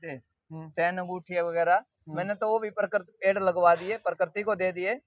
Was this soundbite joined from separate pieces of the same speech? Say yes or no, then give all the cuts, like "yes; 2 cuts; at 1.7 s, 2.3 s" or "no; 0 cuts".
no; 0 cuts